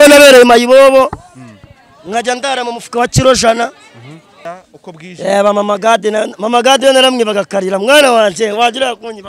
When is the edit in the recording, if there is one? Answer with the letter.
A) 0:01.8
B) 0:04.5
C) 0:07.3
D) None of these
B